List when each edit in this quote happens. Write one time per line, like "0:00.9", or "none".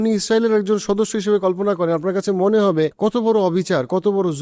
0:02.9